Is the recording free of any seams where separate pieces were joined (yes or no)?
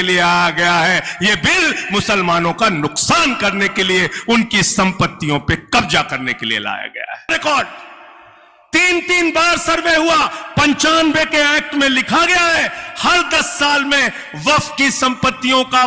no